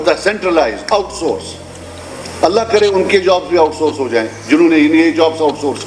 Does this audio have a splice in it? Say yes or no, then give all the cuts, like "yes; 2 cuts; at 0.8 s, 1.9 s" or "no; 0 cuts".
no; 0 cuts